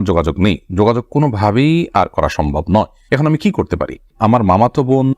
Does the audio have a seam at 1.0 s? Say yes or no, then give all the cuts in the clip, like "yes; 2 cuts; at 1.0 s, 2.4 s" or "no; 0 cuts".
no; 1 cut; at 4.1 s